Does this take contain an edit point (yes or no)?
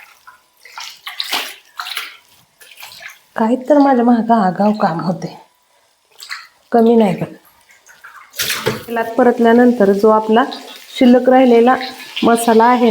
yes